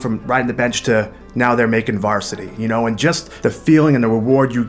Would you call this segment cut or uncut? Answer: cut